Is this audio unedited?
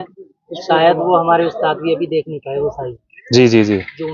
yes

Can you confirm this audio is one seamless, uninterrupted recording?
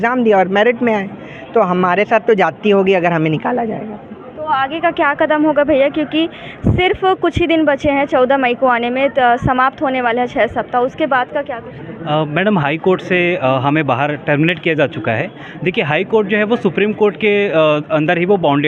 yes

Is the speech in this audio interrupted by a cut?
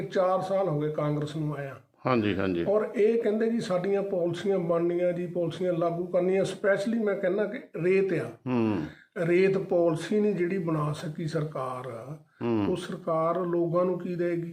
no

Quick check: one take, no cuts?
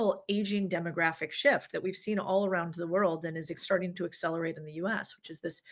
yes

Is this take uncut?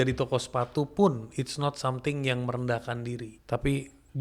no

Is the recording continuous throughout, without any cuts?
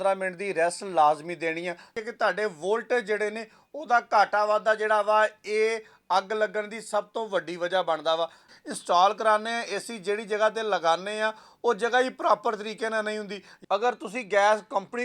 no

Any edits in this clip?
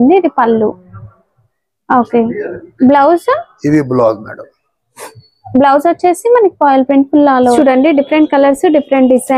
yes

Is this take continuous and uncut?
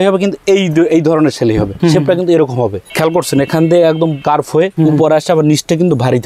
no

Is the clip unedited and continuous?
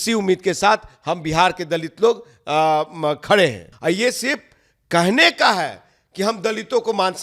no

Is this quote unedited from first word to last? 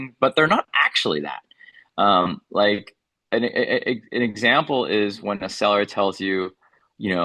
yes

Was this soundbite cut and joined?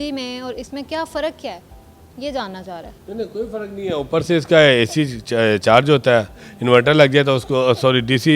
no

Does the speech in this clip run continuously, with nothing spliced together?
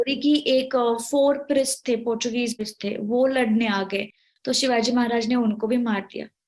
no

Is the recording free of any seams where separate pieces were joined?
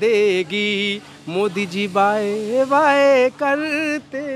yes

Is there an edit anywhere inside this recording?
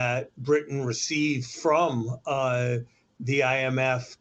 no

